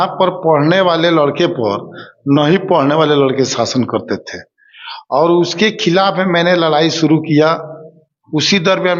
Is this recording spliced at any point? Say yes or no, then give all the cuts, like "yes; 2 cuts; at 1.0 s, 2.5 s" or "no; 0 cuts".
no; 0 cuts